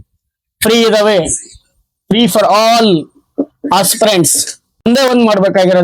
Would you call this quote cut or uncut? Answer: cut